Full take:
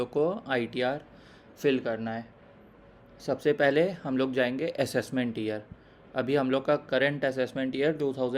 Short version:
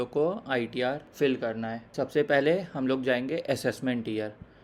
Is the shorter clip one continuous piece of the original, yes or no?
no